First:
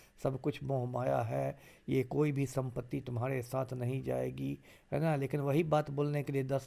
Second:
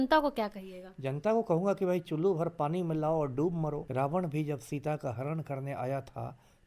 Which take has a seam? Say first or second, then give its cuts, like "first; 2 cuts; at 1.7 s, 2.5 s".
second; 1 cut; at 3.8 s